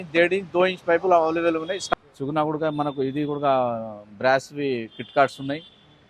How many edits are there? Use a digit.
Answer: 1